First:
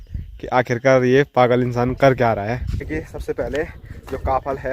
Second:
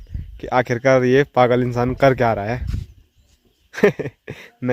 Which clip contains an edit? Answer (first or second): first